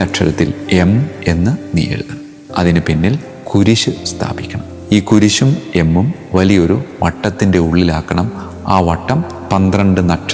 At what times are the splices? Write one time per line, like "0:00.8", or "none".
none